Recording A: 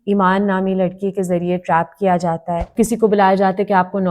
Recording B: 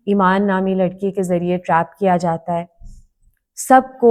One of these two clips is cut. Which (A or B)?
A